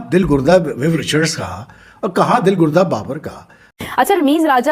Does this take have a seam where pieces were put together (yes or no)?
yes